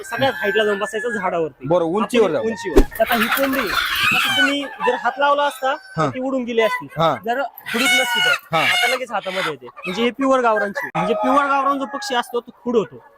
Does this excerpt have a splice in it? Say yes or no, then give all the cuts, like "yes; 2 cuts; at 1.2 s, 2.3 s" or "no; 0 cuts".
yes; 2 cuts; at 2.8 s, 10.9 s